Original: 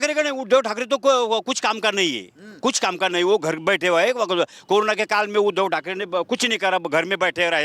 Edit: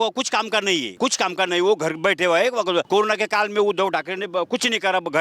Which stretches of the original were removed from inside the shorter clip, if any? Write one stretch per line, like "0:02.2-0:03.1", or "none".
0:02.2-0:02.5
0:04.5-0:04.6